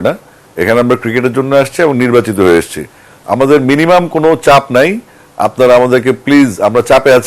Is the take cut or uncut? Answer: uncut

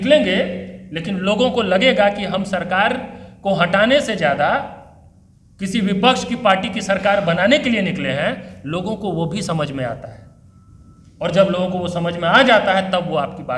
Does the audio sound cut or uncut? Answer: uncut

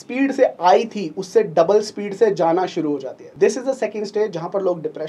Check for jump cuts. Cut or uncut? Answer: cut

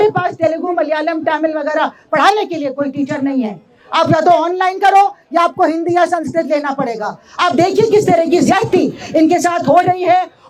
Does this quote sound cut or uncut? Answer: uncut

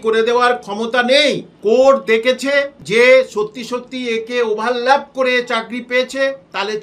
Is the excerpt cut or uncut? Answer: cut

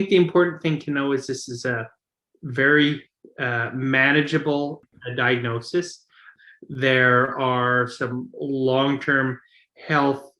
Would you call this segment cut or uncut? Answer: cut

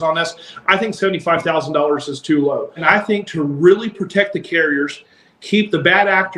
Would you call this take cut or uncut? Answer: cut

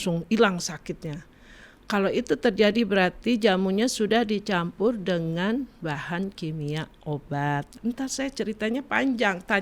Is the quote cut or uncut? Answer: cut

